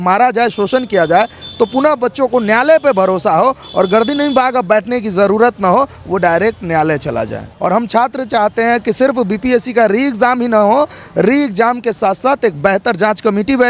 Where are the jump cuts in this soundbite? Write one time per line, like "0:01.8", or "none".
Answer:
0:07.4